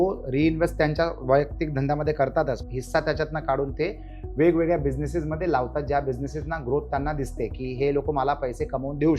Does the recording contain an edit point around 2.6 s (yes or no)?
yes